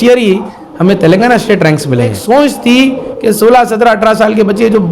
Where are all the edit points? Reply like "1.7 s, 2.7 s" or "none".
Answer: 2.2 s

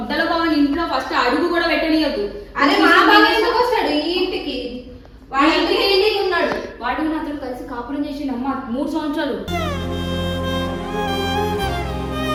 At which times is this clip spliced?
none

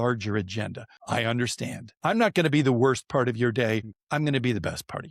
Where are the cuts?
0.9 s, 1.9 s

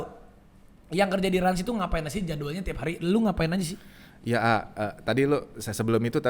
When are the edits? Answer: none

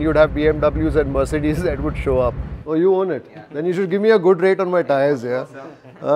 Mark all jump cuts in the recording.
2.5 s

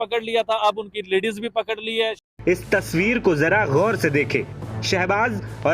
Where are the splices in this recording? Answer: 2.2 s

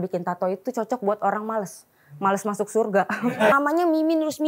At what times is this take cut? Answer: 3.5 s

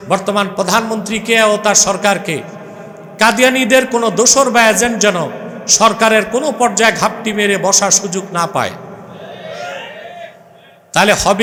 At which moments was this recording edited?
none

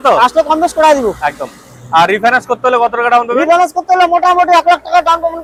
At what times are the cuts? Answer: none

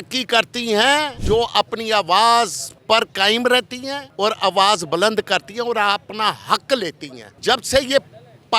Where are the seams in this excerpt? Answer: 1.2 s, 2.7 s, 4.0 s, 7.4 s

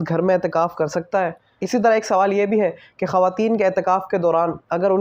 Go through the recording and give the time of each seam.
1.5 s

